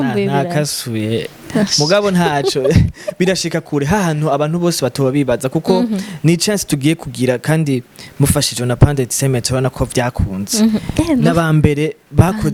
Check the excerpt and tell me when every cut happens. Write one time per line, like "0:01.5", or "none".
none